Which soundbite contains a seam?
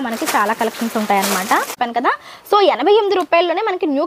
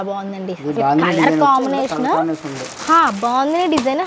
first; 1 cut; at 1.7 s

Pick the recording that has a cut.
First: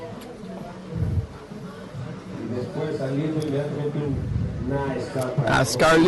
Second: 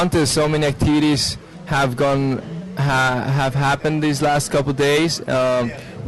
second; 1 cut; at 2.1 s

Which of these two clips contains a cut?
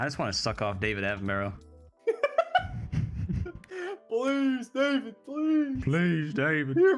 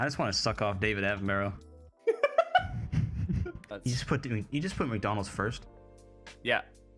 second; 1 cut; at 3.7 s

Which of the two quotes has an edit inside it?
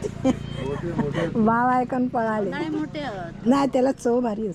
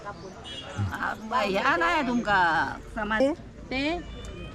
second; 1 cut; at 3.2 s

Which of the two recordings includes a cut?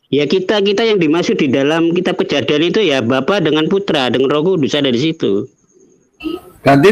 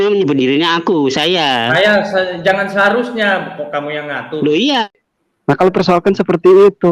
second; 1 cut; at 4.8 s

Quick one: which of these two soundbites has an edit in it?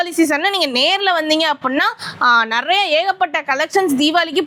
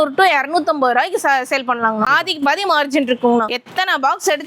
second; 2 cuts; at 2.1 s, 3.5 s

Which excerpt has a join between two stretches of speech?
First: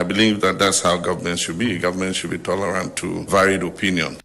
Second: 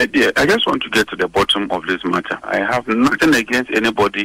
first; 1 cut; at 3.3 s

